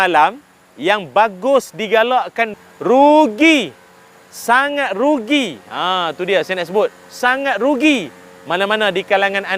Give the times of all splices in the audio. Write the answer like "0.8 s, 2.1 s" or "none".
2.6 s